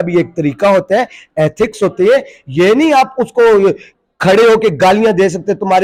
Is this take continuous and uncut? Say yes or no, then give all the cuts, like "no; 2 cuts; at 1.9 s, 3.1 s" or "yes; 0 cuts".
yes; 0 cuts